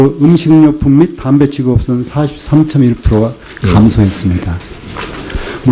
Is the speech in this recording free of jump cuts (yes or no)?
yes